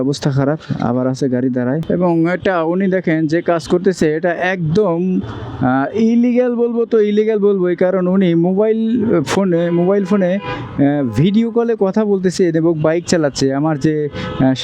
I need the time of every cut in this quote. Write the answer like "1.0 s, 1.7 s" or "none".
1.8 s